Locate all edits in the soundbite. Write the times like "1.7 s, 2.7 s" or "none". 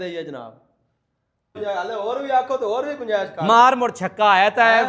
1.6 s